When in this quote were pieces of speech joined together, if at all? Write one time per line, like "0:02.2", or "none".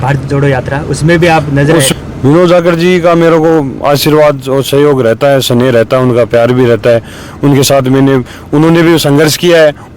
0:01.9

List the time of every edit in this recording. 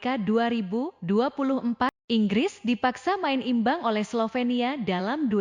0:02.0

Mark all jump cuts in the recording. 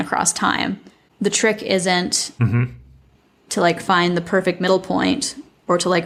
none

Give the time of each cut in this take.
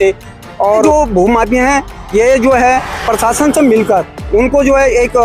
0:00.8
0:04.2

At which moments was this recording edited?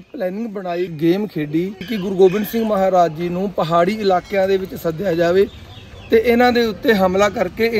0:00.9
0:01.9

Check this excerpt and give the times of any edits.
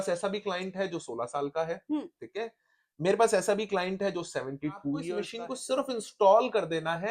0:05.2

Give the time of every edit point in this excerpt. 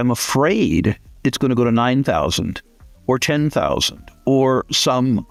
none

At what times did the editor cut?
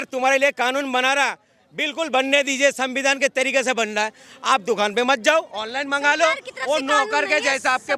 none

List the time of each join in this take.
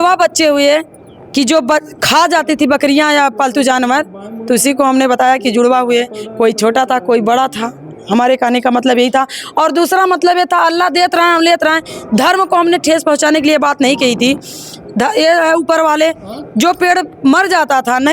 none

